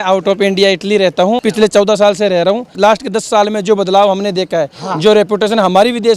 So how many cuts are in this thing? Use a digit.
2